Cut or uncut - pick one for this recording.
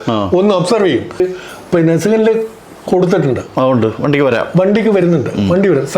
cut